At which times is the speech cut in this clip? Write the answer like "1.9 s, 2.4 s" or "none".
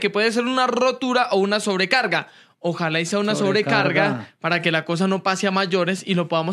none